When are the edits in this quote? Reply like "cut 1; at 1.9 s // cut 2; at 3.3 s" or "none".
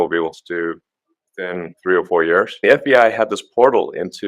cut 1; at 1.7 s // cut 2; at 2.5 s